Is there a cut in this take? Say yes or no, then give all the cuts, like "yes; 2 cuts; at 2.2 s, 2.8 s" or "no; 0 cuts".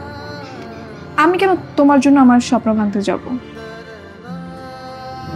no; 0 cuts